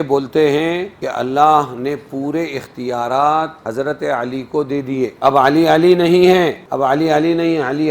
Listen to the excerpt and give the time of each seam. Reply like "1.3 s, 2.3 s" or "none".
1.0 s, 3.6 s, 5.1 s, 6.6 s